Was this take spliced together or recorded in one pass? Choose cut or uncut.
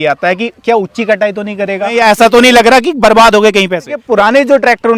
cut